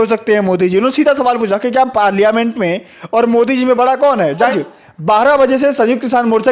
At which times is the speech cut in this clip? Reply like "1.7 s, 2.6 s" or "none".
4.4 s